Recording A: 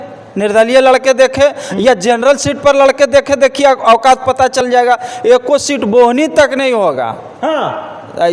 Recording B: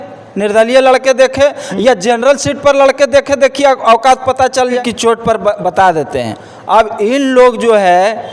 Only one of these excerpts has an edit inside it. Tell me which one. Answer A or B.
B